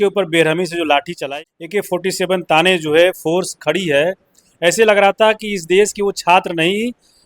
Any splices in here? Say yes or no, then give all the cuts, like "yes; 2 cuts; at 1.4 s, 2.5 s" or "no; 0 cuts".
yes; 1 cut; at 1.2 s